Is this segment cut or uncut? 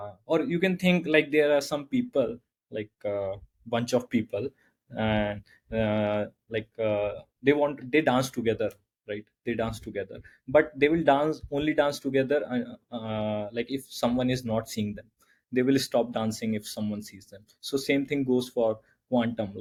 uncut